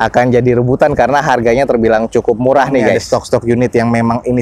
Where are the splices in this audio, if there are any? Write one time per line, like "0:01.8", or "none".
0:03.0